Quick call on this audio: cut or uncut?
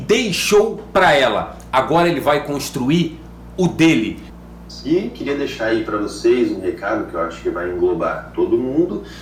uncut